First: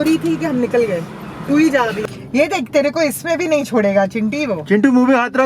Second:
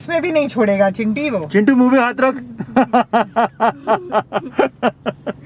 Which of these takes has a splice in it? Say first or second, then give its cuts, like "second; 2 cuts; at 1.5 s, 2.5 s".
first; 1 cut; at 2.0 s